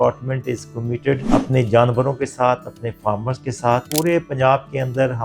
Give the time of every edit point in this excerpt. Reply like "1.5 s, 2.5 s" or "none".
1.2 s, 3.9 s